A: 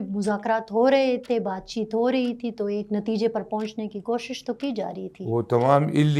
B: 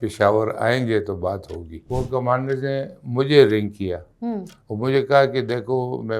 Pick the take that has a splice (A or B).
B